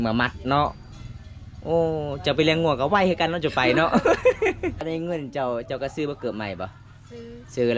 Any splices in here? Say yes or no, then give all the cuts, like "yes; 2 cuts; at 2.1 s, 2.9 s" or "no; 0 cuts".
yes; 1 cut; at 4.8 s